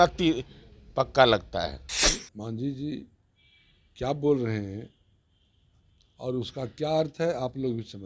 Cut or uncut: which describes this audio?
cut